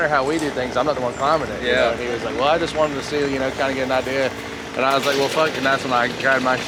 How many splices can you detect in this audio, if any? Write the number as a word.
zero